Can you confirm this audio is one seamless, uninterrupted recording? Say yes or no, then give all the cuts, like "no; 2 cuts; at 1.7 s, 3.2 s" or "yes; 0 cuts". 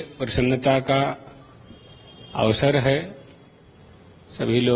yes; 0 cuts